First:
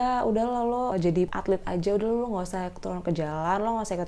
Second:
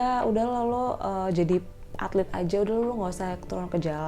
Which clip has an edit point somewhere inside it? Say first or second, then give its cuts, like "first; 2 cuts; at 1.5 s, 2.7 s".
first; 1 cut; at 1.0 s